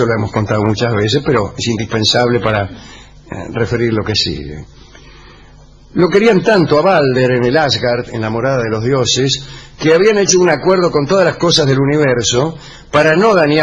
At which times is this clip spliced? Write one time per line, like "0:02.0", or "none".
none